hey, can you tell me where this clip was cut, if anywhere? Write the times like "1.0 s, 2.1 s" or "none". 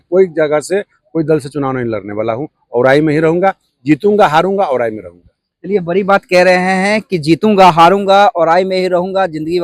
none